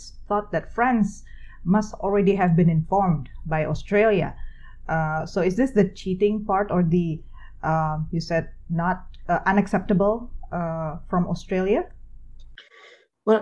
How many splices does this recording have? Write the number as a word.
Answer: zero